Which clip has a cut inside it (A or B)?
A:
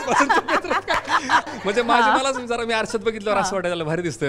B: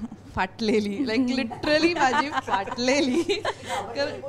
A